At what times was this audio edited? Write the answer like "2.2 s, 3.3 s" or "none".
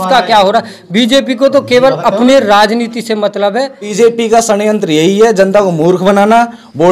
3.9 s